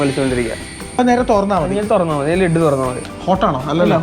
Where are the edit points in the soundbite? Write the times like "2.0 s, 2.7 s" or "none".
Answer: 1.0 s, 3.1 s